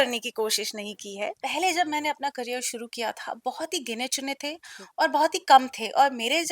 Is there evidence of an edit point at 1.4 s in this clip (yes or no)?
yes